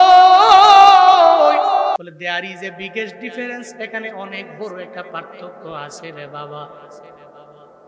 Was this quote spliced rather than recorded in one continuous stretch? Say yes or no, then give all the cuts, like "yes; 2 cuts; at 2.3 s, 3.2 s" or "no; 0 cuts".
yes; 1 cut; at 2.0 s